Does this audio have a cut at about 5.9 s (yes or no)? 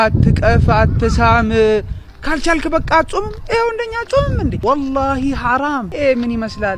yes